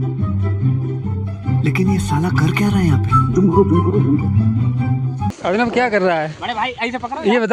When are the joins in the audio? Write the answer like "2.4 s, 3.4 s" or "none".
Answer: 5.3 s